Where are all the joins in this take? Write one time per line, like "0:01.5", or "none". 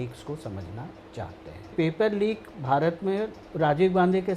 0:01.7
0:03.4